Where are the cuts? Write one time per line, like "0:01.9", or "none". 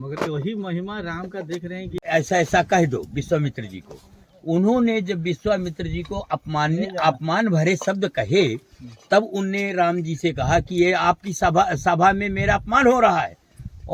0:02.0

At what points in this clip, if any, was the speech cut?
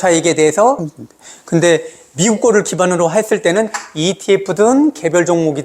0:00.9

